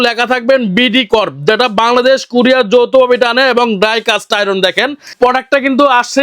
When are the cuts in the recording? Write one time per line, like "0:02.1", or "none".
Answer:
0:05.1